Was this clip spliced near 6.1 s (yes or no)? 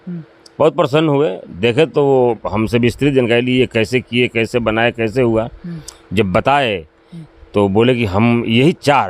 no